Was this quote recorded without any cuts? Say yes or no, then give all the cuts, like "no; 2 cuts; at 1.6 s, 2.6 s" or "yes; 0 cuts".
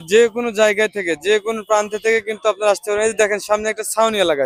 yes; 0 cuts